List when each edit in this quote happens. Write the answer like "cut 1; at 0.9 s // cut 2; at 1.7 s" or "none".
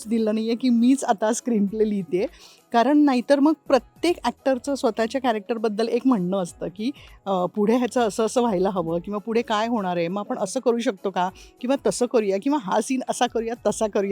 none